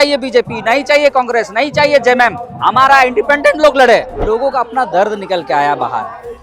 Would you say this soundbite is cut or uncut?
cut